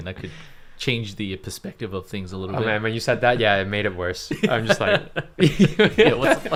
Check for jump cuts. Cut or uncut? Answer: uncut